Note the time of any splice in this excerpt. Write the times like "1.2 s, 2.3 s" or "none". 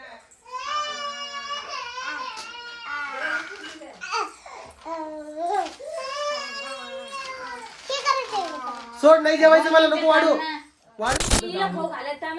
11.1 s